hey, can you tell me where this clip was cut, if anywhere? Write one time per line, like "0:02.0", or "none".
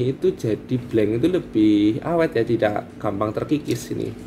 none